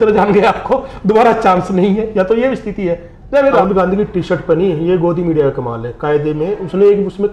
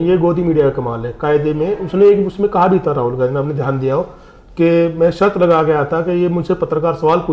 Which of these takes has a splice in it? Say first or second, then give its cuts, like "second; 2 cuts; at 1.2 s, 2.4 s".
first; 1 cut; at 3.6 s